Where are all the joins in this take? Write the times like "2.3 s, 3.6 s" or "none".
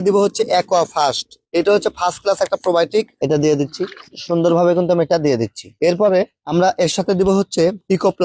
3.1 s